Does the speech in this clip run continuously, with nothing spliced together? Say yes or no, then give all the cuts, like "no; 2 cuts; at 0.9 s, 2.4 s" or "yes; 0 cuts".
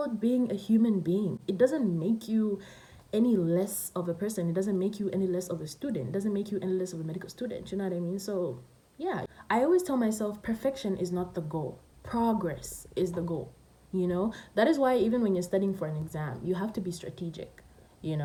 yes; 0 cuts